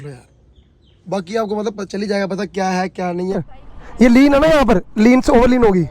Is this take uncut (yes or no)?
no